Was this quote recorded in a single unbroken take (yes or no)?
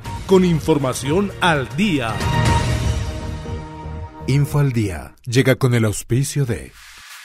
no